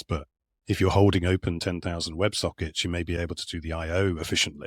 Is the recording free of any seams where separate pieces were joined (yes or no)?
yes